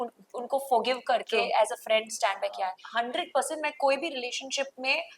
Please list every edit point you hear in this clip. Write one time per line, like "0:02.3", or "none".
0:02.8